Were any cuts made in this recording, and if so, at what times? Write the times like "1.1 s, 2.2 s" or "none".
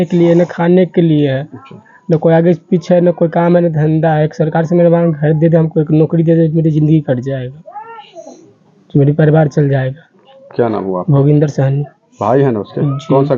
none